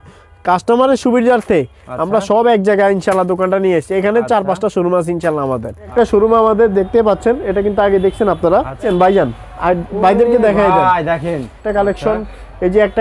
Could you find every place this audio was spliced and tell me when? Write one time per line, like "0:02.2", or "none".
0:05.9
0:08.8
0:11.6